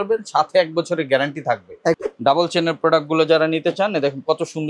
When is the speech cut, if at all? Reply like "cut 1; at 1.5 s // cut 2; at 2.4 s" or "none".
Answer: cut 1; at 2.0 s

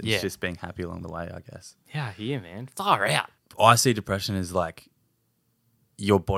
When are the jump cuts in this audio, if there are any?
cut 1; at 3.4 s

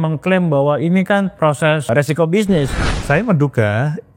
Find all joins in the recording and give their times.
cut 1; at 1.9 s // cut 2; at 2.9 s

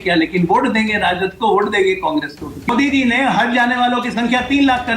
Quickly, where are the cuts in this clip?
cut 1; at 2.7 s

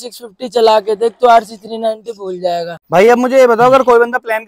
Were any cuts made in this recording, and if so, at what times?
cut 1; at 2.8 s

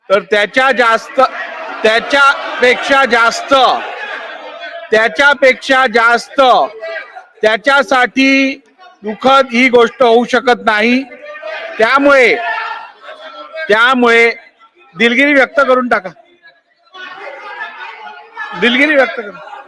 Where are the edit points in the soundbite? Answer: none

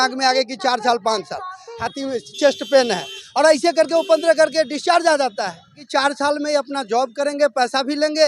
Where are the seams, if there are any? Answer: cut 1; at 1.8 s // cut 2; at 5.8 s

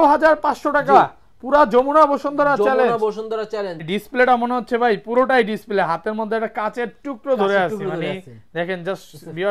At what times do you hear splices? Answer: cut 1; at 3.8 s

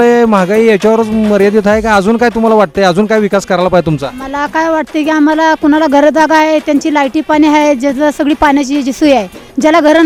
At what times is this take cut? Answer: none

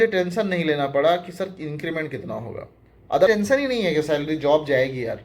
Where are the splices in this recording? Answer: cut 1; at 3.3 s

